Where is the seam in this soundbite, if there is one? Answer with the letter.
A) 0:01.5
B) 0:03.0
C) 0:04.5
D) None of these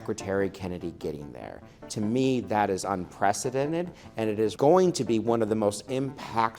C